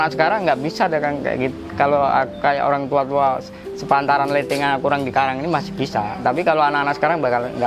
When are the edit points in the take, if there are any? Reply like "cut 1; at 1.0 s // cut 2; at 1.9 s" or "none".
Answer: none

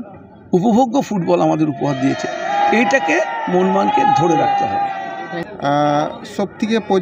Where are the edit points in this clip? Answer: none

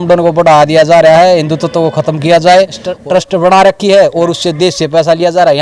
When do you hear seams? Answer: cut 1; at 2.9 s

